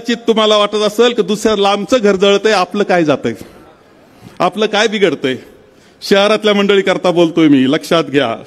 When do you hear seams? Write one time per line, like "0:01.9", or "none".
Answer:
none